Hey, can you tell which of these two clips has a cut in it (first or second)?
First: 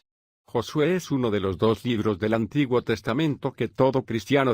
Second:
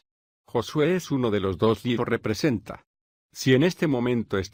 first